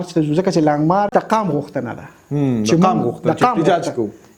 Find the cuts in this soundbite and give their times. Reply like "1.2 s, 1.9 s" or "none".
1.1 s